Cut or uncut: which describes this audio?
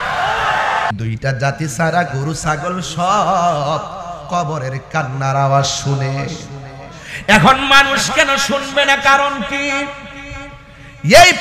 cut